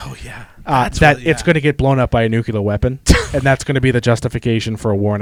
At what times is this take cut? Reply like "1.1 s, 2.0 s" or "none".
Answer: none